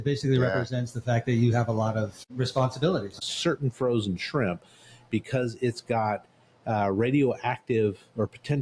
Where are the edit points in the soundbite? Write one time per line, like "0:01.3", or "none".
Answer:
0:02.2
0:03.2